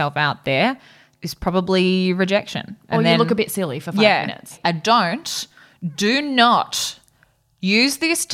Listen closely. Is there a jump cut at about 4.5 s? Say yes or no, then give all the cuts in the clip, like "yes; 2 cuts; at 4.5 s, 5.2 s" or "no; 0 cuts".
yes; 1 cut; at 4.5 s